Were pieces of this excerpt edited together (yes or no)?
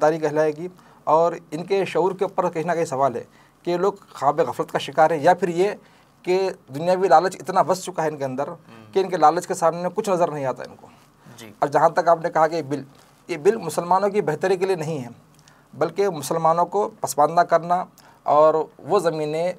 no